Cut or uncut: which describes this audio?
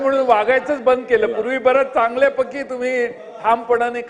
uncut